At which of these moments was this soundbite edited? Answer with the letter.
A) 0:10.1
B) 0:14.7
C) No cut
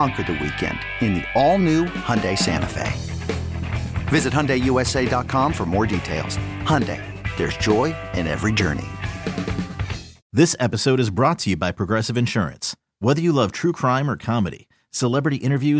A